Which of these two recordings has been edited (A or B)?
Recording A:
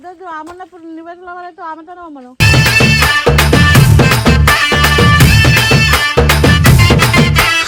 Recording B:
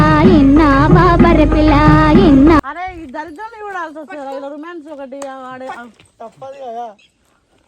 B